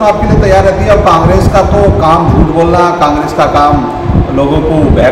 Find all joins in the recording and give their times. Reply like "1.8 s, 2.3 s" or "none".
none